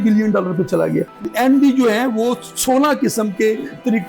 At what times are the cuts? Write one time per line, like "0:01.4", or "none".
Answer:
0:01.3